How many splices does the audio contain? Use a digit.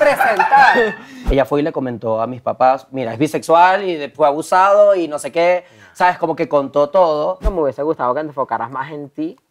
2